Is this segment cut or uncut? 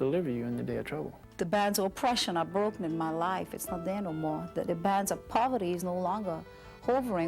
uncut